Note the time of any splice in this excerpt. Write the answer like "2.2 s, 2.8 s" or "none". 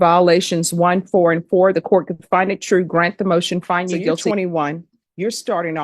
4.2 s